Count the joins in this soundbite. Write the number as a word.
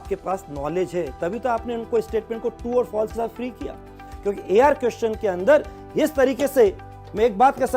one